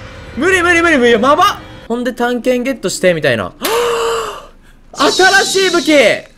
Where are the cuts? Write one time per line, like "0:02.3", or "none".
0:01.7